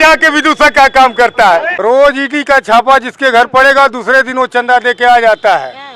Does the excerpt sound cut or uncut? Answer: cut